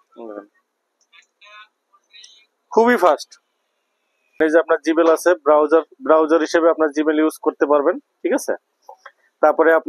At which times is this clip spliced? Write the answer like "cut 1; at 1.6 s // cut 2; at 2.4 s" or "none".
cut 1; at 4.4 s

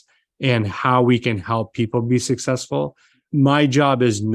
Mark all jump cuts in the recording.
cut 1; at 3.2 s

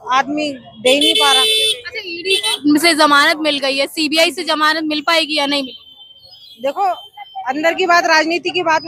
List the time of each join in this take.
none

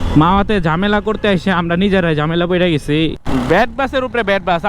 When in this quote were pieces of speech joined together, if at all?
cut 1; at 3.1 s

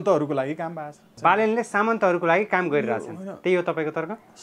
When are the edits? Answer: cut 1; at 1.1 s

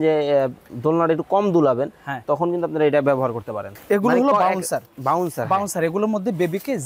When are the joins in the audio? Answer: cut 1; at 3.7 s

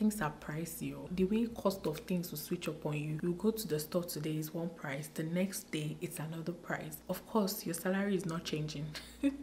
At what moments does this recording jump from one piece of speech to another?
cut 1; at 1.0 s // cut 2; at 3.2 s // cut 3; at 7.0 s

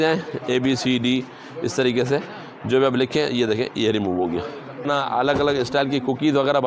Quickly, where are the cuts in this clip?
cut 1; at 4.9 s

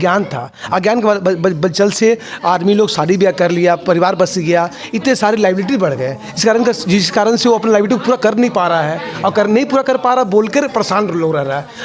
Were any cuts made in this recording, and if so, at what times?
none

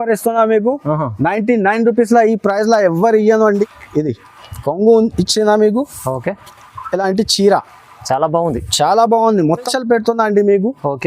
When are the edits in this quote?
cut 1; at 3.7 s // cut 2; at 9.7 s

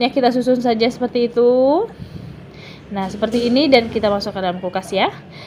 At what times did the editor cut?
none

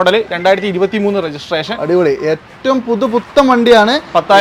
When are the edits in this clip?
none

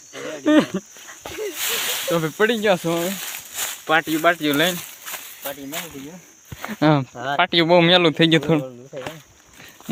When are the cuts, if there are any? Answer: none

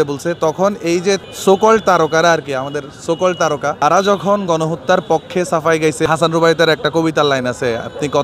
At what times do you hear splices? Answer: cut 1; at 1.3 s // cut 2; at 3.8 s // cut 3; at 6.1 s

